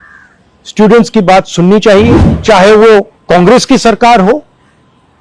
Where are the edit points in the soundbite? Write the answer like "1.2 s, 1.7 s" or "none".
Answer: 2.3 s